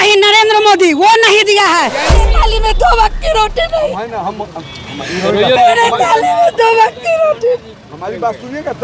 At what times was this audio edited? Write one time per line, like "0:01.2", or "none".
0:02.3